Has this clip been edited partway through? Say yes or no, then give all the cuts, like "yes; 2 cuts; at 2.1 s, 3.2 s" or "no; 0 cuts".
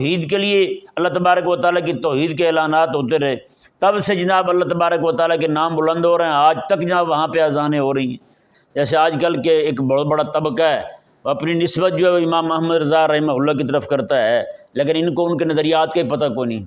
yes; 1 cut; at 8.5 s